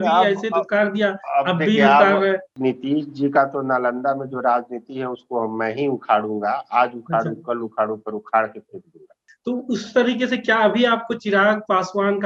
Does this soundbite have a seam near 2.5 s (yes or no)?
yes